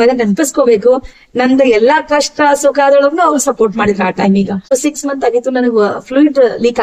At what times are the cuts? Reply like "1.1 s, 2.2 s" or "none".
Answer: 4.7 s